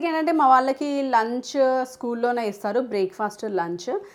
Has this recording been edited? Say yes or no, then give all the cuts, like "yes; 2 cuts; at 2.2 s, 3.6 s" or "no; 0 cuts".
no; 0 cuts